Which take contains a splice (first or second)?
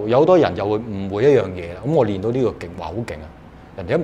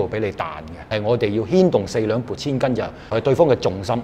second